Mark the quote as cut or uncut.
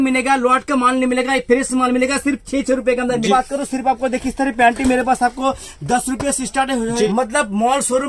cut